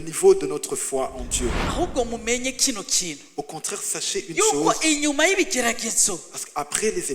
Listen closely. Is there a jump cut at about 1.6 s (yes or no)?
yes